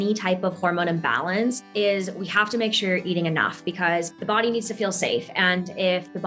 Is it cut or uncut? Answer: cut